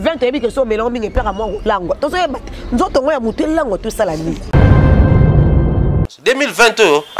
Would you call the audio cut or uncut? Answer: cut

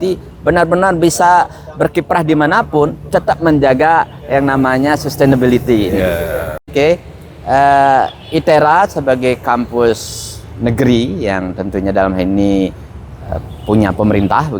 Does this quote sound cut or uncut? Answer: cut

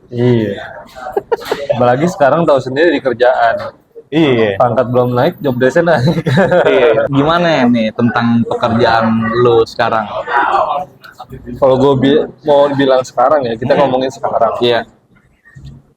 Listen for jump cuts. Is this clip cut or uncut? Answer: cut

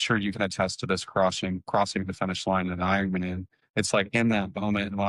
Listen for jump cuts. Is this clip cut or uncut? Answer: uncut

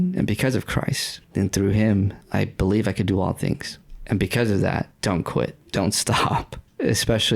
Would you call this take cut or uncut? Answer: uncut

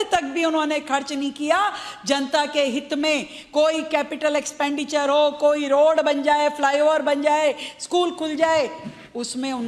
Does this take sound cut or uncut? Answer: cut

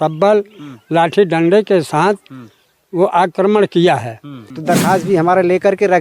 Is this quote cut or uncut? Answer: cut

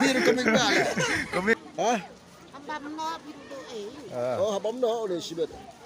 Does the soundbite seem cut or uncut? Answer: cut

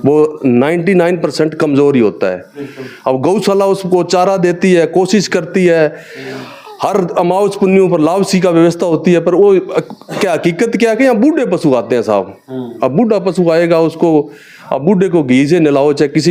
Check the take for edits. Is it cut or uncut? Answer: uncut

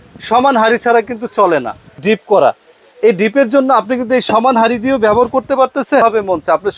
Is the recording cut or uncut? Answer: cut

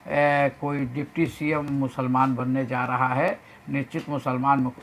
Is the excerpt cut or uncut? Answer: uncut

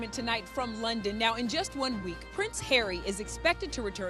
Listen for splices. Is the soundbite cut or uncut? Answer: uncut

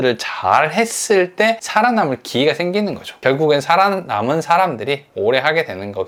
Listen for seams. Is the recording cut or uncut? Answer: uncut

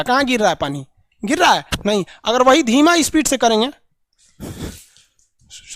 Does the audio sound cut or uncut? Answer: uncut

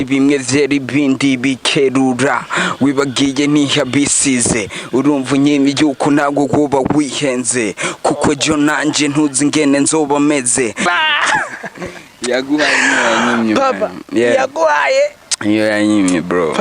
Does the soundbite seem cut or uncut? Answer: cut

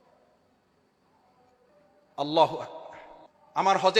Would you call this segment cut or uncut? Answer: cut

